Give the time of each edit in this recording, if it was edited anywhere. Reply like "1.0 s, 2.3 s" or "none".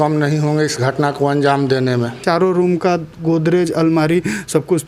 2.2 s